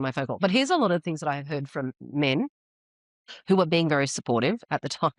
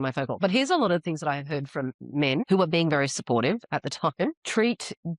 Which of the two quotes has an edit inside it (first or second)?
second